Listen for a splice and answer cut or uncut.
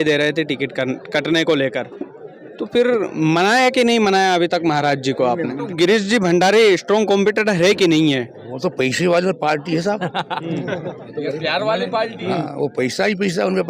cut